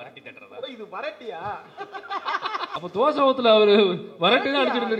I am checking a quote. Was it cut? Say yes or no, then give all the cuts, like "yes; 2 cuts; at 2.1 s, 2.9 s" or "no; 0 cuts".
yes; 1 cut; at 2.8 s